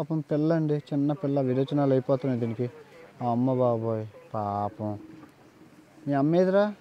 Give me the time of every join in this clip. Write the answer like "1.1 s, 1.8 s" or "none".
none